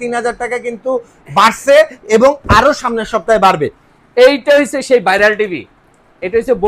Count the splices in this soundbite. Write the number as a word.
zero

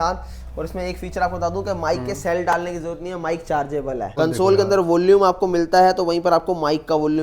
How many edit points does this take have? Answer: one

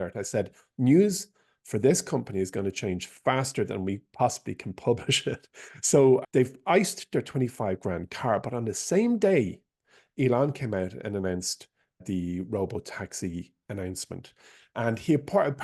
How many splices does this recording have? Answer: one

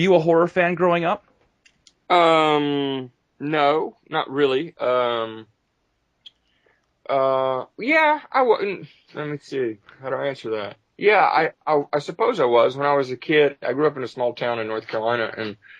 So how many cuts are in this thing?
one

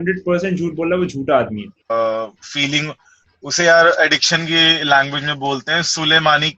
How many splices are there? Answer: one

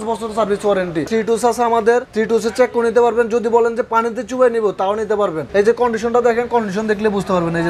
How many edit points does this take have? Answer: two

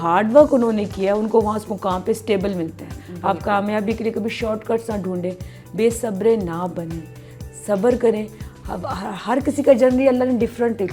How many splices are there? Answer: zero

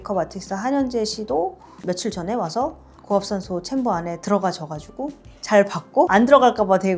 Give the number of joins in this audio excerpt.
zero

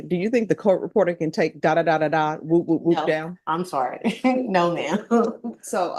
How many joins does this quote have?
zero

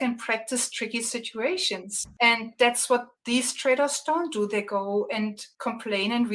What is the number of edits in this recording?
three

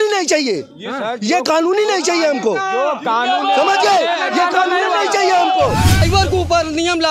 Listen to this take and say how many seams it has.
one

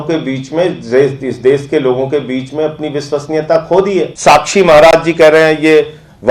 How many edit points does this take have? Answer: one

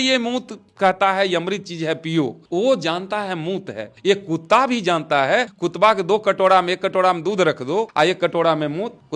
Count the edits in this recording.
two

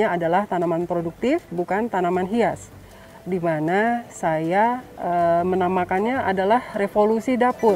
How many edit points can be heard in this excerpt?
one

